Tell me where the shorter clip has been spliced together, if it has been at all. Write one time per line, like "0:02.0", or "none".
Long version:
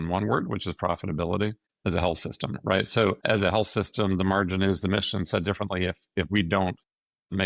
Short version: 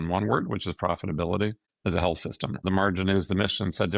0:02.6